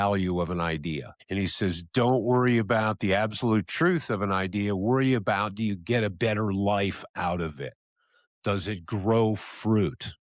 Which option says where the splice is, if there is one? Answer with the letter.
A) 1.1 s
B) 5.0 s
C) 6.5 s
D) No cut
A